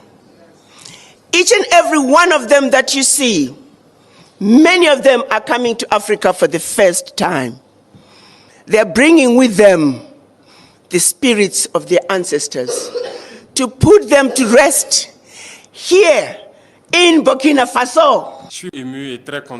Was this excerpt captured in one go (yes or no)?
no